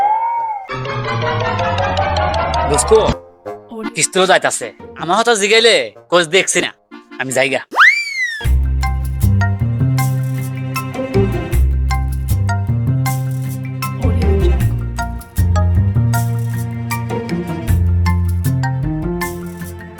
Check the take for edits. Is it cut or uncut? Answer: uncut